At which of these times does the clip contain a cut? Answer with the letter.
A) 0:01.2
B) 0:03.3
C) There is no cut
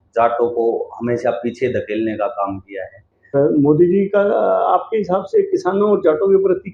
B